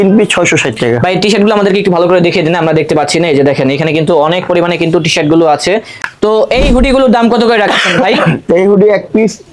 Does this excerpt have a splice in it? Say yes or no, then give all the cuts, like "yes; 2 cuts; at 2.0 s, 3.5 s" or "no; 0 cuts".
yes; 1 cut; at 6.0 s